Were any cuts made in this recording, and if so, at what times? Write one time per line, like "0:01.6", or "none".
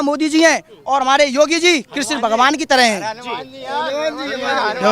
none